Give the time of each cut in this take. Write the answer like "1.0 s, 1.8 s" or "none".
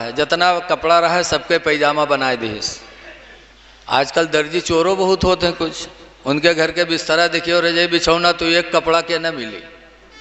none